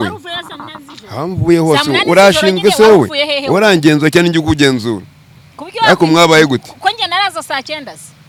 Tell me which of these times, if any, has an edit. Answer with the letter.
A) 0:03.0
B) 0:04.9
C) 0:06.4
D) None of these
D